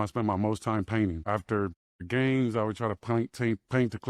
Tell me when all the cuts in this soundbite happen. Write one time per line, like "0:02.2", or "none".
0:01.6